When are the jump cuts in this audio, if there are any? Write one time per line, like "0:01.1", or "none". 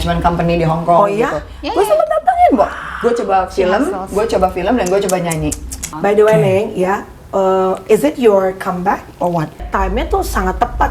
0:05.8
0:09.6